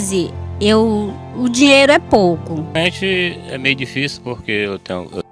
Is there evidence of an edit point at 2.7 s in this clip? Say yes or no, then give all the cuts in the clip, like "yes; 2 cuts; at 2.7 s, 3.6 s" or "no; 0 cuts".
yes; 1 cut; at 2.7 s